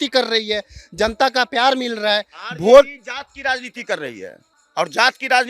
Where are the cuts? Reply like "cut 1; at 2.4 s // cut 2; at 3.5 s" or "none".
none